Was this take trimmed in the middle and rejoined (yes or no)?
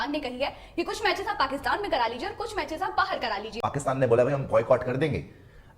yes